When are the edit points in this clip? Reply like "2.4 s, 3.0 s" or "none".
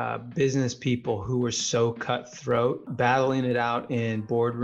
2.9 s